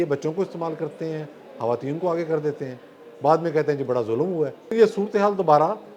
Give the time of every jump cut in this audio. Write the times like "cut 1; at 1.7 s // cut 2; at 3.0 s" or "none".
cut 1; at 4.7 s